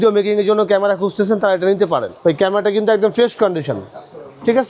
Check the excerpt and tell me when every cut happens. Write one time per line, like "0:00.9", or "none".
0:02.1